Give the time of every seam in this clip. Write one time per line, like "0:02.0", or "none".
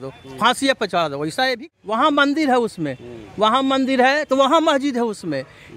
0:01.3